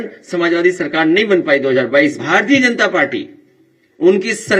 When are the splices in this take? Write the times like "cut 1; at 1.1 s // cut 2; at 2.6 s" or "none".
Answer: cut 1; at 2.2 s